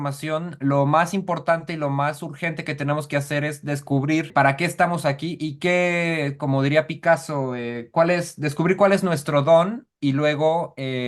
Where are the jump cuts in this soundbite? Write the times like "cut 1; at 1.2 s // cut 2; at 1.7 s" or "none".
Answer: cut 1; at 4.3 s